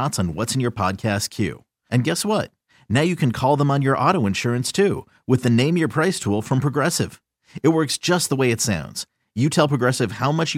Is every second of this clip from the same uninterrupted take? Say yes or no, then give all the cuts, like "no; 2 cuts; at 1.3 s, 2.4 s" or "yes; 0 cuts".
yes; 0 cuts